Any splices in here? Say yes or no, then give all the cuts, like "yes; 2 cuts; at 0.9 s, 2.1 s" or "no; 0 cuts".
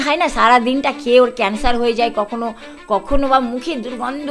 no; 0 cuts